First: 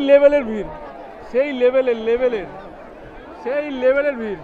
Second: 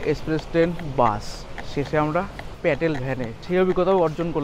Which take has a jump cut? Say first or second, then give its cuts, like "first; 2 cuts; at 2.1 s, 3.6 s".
second; 2 cuts; at 2.4 s, 3.4 s